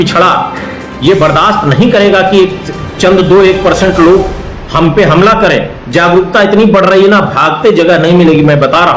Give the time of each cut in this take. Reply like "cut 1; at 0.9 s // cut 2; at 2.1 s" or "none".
none